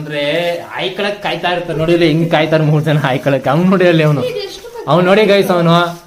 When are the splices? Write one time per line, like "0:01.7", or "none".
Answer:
none